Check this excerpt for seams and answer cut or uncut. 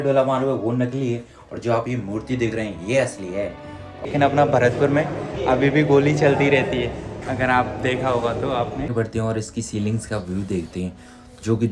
cut